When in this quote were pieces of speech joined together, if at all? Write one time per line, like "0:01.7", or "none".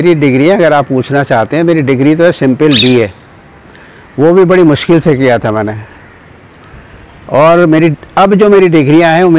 none